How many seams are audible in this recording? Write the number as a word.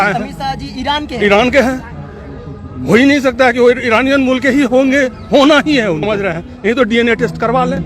one